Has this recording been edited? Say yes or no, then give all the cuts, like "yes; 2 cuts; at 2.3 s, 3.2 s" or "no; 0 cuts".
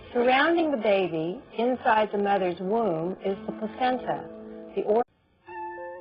no; 0 cuts